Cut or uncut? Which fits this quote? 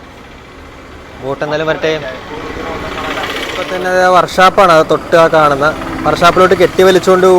uncut